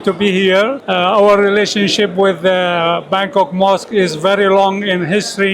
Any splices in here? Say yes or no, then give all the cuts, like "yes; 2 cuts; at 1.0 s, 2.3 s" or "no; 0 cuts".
no; 0 cuts